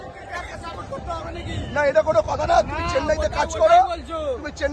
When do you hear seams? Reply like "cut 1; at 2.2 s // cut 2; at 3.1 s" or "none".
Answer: none